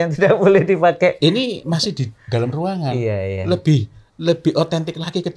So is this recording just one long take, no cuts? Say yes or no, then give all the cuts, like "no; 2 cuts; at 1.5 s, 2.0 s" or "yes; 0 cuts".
yes; 0 cuts